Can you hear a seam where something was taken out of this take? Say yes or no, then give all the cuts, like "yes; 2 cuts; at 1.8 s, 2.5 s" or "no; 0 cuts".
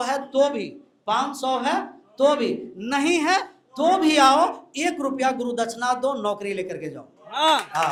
no; 0 cuts